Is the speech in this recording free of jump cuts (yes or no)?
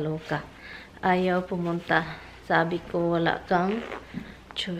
yes